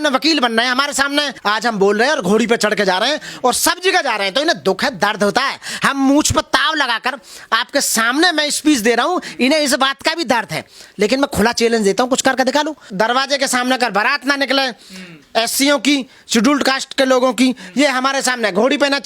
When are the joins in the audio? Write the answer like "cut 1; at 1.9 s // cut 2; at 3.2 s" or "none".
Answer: cut 1; at 1.3 s // cut 2; at 12.8 s